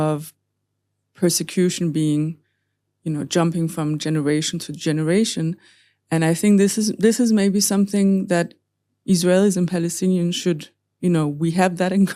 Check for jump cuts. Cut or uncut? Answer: uncut